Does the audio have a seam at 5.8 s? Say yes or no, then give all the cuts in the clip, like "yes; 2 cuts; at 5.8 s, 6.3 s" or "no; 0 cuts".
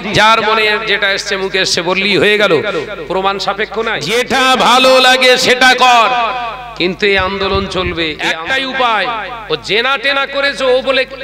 no; 2 cuts; at 4.0 s, 8.3 s